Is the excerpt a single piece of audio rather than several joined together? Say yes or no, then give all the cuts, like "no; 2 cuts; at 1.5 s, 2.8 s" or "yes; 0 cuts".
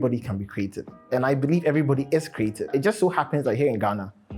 no; 1 cut; at 2.7 s